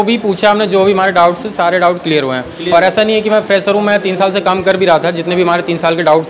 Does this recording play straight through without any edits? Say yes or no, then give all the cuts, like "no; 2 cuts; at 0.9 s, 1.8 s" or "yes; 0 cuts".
yes; 0 cuts